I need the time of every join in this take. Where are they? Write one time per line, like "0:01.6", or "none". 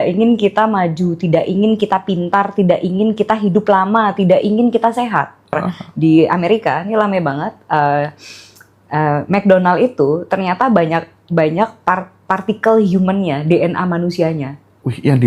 0:05.5